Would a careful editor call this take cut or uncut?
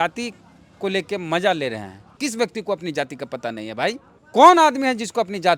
cut